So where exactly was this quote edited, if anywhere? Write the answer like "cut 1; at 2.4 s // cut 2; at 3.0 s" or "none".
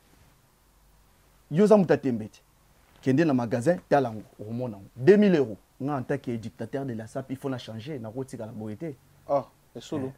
cut 1; at 5.7 s